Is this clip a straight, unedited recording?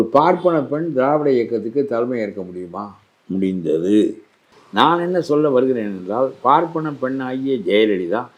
no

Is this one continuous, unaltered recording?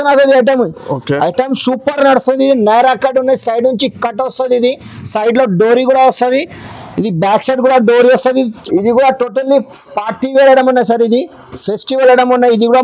no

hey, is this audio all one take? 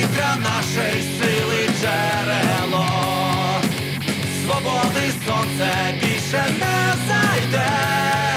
yes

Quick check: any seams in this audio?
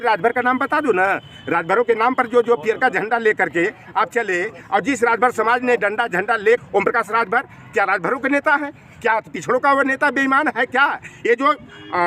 yes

